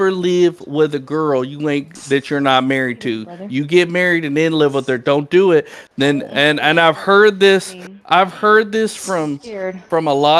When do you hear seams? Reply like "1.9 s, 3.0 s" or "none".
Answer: none

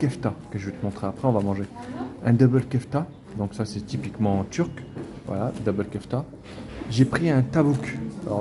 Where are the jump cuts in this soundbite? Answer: none

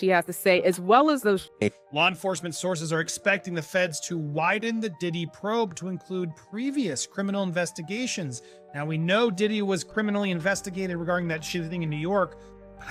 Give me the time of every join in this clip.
none

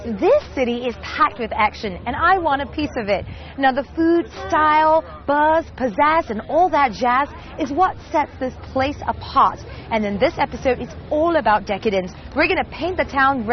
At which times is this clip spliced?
10.1 s

